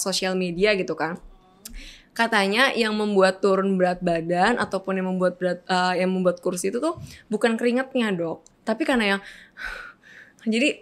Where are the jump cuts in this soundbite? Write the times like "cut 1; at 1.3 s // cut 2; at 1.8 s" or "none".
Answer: none